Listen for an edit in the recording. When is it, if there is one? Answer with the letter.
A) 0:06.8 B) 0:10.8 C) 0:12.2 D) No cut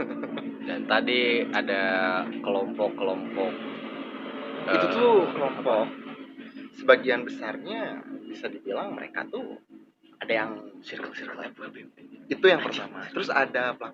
B